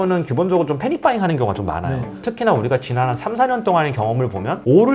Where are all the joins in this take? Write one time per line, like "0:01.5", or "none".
none

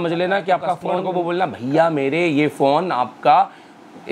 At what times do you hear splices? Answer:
0:00.9

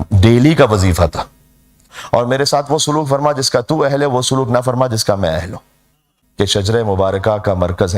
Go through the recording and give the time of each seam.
0:01.9
0:06.2

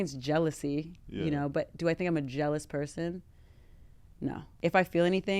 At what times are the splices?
0:04.5

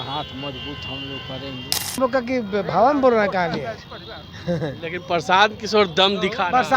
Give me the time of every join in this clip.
0:02.0

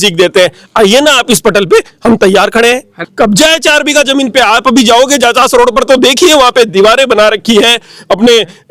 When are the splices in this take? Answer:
0:02.9

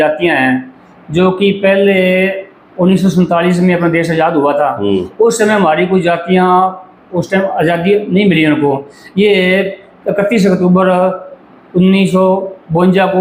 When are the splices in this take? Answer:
none

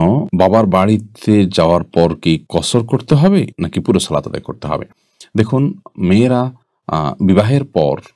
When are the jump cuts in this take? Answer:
none

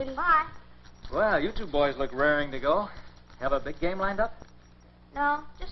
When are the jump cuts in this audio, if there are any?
0:01.2

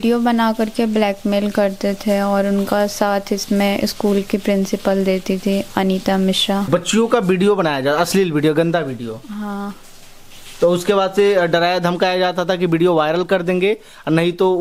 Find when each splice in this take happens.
0:06.7

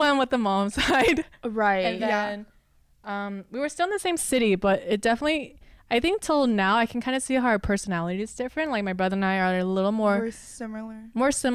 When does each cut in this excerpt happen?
none

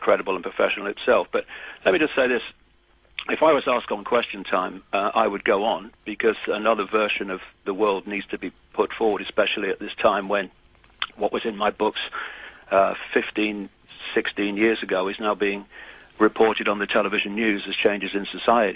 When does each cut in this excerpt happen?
0:08.3

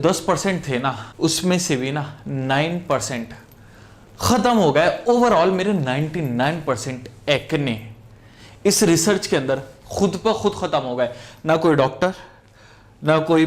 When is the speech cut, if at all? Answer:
0:01.1

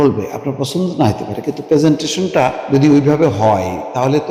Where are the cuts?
0:02.6

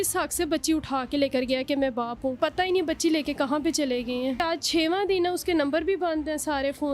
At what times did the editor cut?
0:02.4
0:04.4

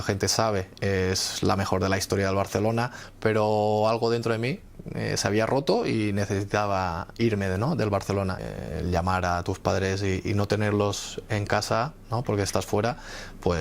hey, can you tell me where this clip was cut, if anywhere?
0:03.0
0:08.4

